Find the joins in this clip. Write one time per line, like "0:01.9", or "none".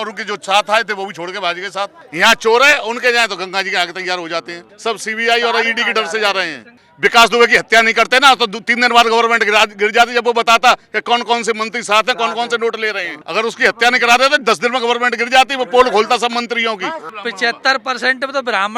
0:02.0
0:04.7
0:06.9
0:13.1
0:17.1